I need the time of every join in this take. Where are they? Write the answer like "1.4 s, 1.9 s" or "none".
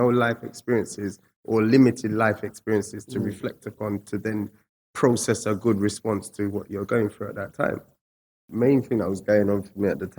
8.4 s